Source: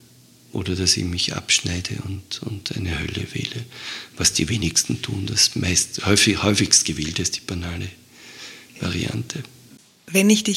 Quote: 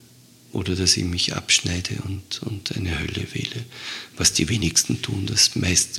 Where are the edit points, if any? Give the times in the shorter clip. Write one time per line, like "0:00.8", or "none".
none